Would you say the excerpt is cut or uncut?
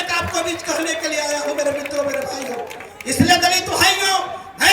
uncut